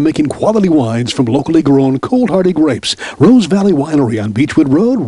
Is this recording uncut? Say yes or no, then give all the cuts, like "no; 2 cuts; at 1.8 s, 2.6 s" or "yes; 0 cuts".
yes; 0 cuts